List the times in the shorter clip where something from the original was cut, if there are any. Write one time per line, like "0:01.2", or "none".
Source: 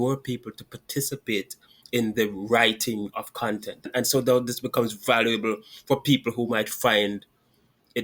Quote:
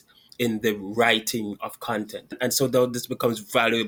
none